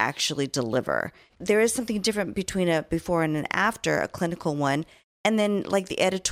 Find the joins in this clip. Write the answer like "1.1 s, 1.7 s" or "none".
1.3 s